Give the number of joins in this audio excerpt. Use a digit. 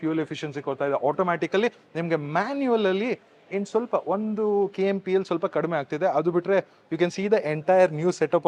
0